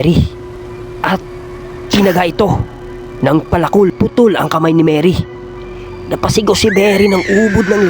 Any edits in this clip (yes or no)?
no